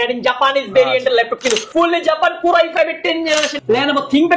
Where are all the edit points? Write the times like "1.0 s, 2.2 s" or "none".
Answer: 1.6 s, 3.5 s